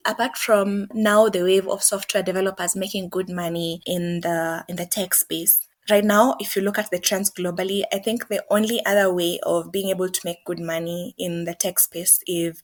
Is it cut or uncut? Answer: uncut